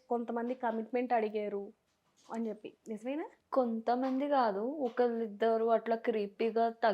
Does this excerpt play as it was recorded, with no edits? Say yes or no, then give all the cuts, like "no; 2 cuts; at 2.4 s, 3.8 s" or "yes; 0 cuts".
no; 1 cut; at 3.4 s